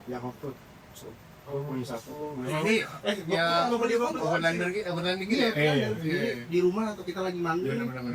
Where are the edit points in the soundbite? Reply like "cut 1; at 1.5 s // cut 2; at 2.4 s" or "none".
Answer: none